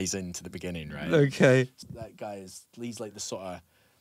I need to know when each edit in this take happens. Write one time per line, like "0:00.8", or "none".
0:01.8